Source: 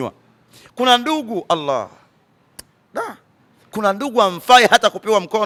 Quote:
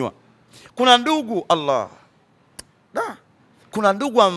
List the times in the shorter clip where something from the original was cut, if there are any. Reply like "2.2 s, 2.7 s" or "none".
none